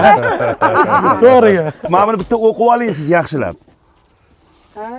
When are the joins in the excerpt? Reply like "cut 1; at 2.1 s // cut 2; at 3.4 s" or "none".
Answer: cut 1; at 1.8 s